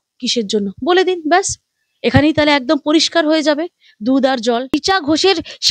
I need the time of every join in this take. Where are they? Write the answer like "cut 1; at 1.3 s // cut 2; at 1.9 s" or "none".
cut 1; at 4.8 s